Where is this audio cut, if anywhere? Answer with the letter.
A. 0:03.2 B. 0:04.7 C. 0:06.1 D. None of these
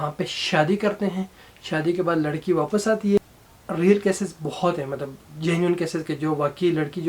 A